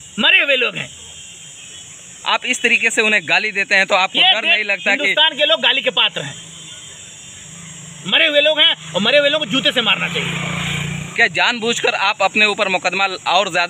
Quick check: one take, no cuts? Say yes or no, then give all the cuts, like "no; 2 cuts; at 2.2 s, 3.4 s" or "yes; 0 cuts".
yes; 0 cuts